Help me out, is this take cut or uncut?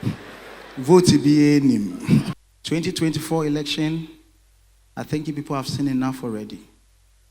cut